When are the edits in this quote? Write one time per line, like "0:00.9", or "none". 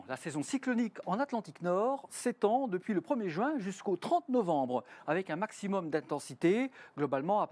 none